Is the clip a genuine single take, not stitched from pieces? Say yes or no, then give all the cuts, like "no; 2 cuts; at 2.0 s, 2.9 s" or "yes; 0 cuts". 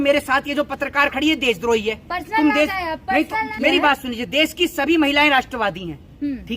no; 1 cut; at 3.5 s